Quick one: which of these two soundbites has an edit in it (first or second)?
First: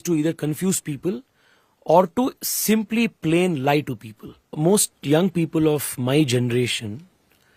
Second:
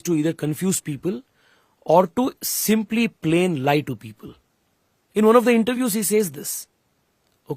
first